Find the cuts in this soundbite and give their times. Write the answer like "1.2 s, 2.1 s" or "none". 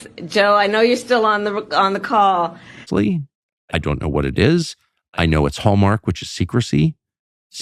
2.9 s